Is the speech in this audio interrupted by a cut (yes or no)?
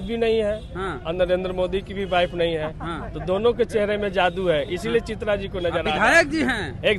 no